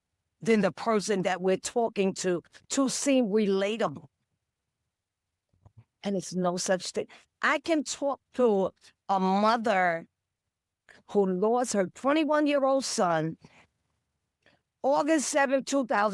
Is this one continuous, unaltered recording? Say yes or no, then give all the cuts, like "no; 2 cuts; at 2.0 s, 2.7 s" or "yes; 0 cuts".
yes; 0 cuts